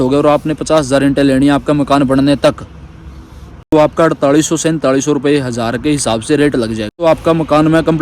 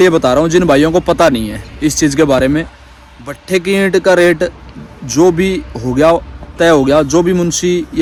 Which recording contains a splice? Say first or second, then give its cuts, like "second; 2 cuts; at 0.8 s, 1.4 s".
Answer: first; 1 cut; at 7.0 s